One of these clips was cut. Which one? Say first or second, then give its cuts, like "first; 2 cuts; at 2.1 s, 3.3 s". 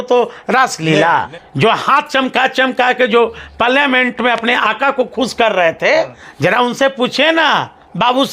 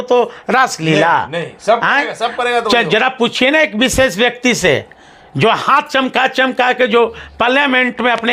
first; 2 cuts; at 1.4 s, 6.2 s